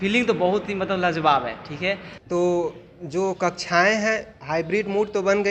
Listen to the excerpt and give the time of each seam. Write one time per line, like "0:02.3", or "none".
0:02.1